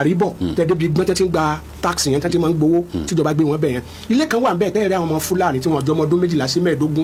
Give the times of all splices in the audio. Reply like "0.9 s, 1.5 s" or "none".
none